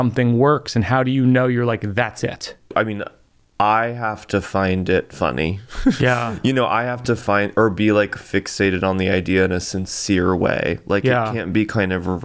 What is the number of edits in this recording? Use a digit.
1